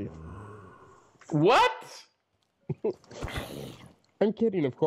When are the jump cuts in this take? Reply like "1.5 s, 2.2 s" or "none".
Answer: none